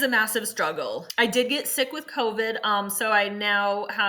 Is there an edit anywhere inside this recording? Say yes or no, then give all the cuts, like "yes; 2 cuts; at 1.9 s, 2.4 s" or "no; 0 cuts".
yes; 1 cut; at 1.0 s